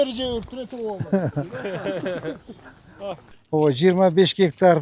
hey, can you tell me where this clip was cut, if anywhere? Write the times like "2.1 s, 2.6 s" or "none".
3.3 s

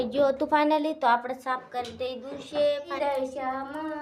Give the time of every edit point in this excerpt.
2.9 s

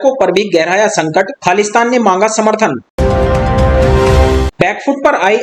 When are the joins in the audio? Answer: 2.9 s, 4.5 s

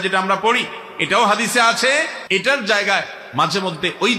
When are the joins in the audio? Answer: 2.2 s

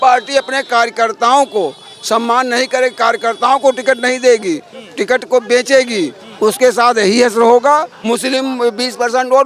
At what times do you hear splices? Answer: 7.9 s

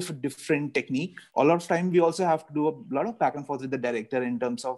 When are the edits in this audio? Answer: 1.2 s

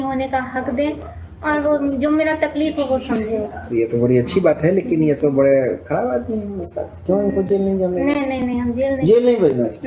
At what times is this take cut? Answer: none

